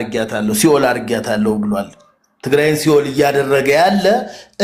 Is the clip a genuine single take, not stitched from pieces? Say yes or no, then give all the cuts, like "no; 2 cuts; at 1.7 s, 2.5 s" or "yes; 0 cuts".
yes; 0 cuts